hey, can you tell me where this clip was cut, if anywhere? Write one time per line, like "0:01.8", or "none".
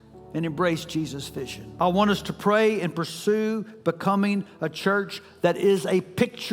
0:01.6